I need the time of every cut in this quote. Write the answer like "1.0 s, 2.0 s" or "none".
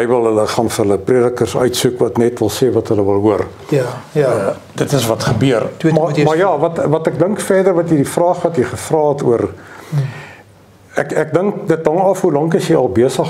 none